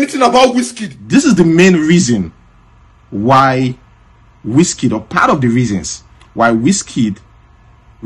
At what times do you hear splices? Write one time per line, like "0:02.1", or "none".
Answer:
0:01.0